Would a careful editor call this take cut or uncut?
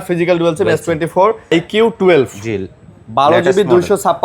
cut